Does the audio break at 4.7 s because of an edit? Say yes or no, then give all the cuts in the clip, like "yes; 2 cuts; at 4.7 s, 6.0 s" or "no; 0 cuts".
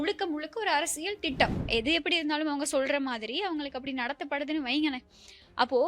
no; 1 cut; at 1.6 s